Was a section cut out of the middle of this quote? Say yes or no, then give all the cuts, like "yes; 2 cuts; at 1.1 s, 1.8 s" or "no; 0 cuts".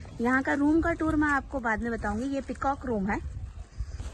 no; 0 cuts